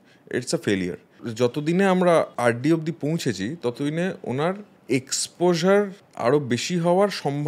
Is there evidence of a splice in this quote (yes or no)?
yes